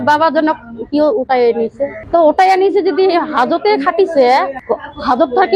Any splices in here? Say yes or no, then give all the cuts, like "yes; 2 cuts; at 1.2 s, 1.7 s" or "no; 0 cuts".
yes; 2 cuts; at 1.9 s, 4.6 s